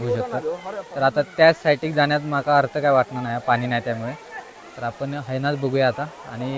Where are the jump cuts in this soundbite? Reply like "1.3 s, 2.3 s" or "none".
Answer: none